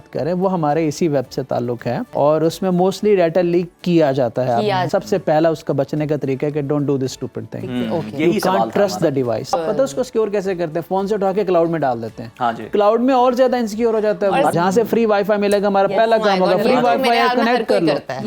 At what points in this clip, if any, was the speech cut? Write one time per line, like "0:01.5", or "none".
0:02.1
0:04.9
0:09.5
0:14.5